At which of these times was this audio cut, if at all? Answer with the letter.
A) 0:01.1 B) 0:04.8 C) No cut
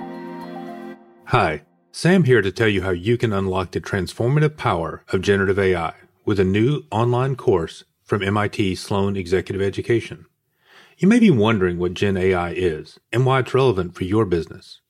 A